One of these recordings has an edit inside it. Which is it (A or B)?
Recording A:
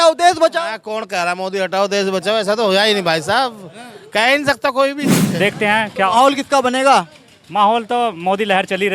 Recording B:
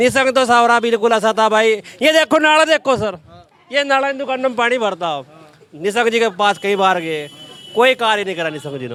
A